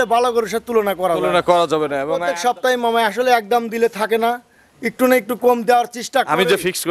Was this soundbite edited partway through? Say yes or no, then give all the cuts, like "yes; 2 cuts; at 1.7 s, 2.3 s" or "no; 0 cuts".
yes; 1 cut; at 2.2 s